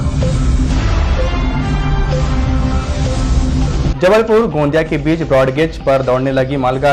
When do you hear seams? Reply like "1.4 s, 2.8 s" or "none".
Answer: 3.9 s